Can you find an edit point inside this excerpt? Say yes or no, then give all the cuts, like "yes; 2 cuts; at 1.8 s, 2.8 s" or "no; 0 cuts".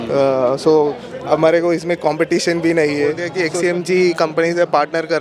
yes; 1 cut; at 3.3 s